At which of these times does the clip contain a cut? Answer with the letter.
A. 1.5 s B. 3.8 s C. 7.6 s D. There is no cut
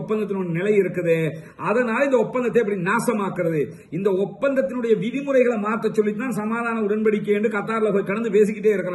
D